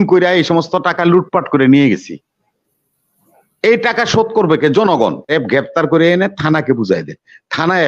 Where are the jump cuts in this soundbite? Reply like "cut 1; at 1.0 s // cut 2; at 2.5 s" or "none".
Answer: cut 1; at 5.3 s